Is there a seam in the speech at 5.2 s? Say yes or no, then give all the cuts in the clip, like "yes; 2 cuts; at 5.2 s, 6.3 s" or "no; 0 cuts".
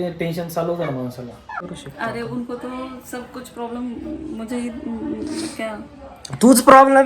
no; 1 cut; at 1.7 s